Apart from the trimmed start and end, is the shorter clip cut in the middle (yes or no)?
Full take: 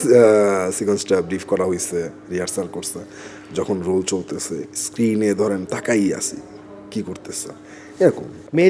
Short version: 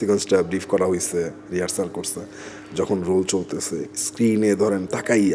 no